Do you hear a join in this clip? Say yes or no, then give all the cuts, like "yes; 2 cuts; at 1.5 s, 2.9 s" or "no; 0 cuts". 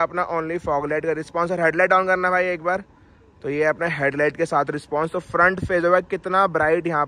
no; 0 cuts